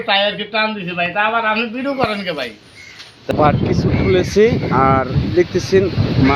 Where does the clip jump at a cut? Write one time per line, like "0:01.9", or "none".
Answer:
0:03.3